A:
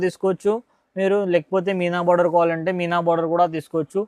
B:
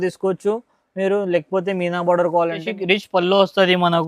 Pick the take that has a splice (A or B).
B